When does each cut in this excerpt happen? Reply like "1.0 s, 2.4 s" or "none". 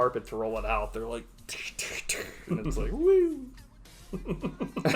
none